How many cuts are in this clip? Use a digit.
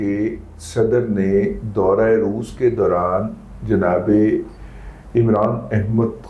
0